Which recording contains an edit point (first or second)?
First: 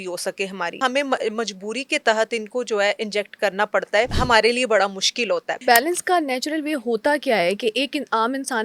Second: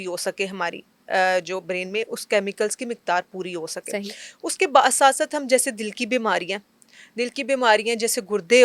first